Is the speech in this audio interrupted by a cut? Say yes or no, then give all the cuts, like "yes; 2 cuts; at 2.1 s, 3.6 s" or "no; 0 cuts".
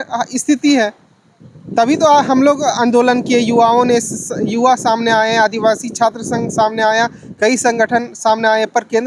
no; 0 cuts